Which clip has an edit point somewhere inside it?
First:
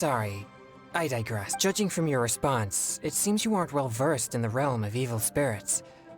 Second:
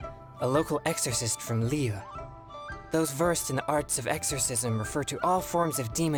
first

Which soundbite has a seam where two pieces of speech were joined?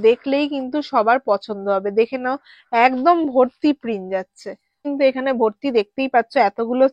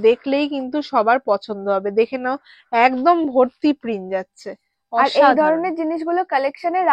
first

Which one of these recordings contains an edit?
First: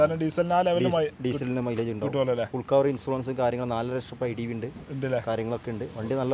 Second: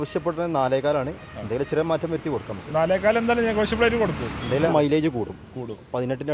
second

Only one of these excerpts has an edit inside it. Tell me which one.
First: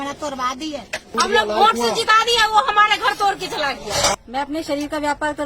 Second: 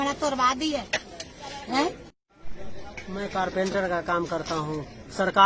first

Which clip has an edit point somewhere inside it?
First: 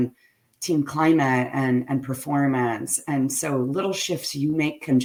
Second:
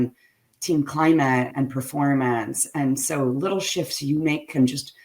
second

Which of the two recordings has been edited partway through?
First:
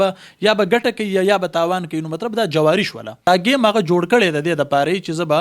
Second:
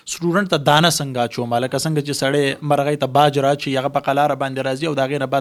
first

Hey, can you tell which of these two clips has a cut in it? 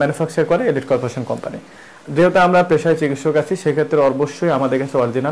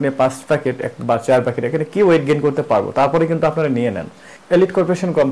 second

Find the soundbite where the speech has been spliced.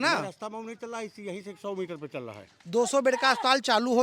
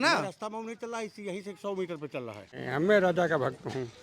second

